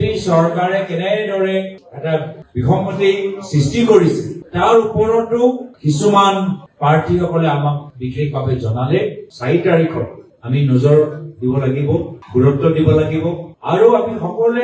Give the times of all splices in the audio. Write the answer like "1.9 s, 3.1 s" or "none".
9.3 s